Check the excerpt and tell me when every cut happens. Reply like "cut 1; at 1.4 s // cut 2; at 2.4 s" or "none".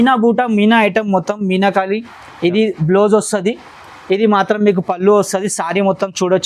none